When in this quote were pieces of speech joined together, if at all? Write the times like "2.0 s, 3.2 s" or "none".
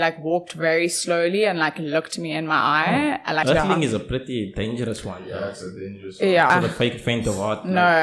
3.4 s, 6.5 s